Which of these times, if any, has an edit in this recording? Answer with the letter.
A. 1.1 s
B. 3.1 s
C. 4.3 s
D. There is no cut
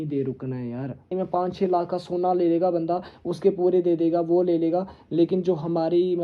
A